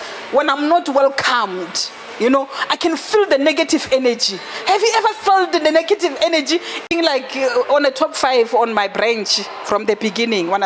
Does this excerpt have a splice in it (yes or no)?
yes